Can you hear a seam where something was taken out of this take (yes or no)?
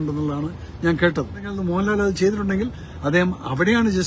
yes